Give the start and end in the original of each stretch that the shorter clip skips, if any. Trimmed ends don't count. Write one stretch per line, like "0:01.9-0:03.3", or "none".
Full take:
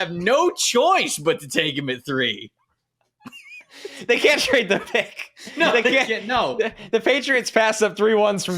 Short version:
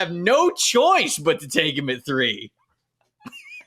none